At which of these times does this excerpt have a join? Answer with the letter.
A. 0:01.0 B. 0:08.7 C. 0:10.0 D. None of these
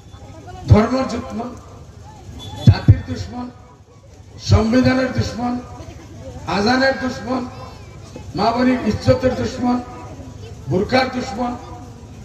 D